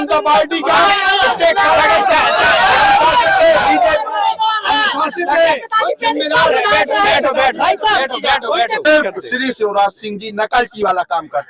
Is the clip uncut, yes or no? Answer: no